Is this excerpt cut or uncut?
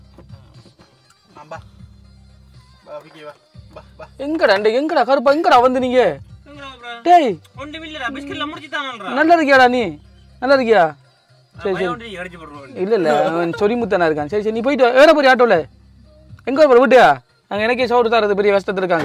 uncut